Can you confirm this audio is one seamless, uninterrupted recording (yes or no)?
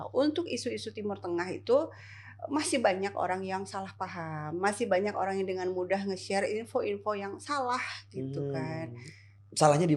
yes